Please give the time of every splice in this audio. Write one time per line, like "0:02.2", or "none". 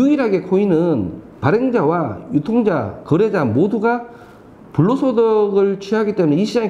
none